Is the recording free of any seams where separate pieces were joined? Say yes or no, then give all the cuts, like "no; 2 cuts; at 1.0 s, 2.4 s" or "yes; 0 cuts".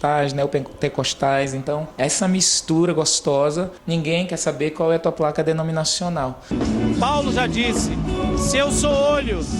no; 3 cuts; at 1.9 s, 3.8 s, 6.5 s